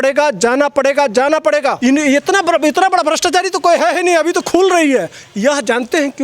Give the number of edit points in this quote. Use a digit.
1